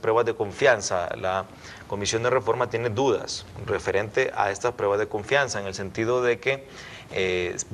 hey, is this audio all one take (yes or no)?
no